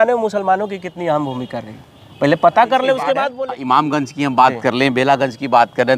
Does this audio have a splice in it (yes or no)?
yes